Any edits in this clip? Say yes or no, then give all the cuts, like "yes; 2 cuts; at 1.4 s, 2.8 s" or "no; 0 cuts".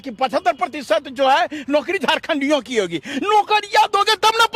no; 0 cuts